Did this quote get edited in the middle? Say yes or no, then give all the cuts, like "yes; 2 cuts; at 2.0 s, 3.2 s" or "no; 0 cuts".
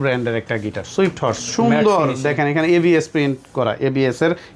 no; 0 cuts